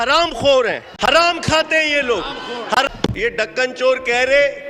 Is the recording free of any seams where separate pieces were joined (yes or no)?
no